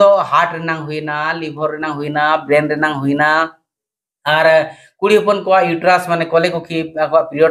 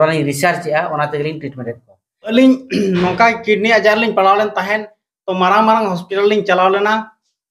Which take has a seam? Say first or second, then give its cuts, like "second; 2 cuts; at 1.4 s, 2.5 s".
second; 1 cut; at 2.3 s